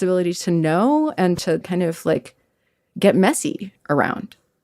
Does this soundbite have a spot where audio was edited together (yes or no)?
yes